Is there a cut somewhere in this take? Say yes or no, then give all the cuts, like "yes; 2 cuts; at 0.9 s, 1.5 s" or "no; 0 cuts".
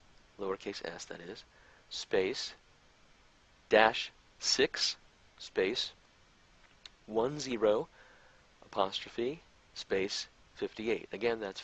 no; 0 cuts